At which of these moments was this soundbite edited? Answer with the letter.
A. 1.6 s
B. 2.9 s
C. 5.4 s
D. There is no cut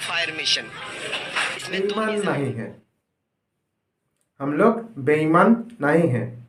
A